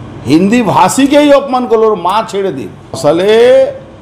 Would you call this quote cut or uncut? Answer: cut